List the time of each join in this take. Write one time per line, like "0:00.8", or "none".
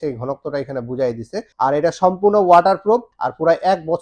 0:01.4
0:03.1